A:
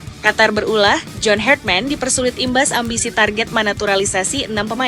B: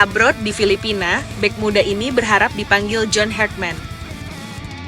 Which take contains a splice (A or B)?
B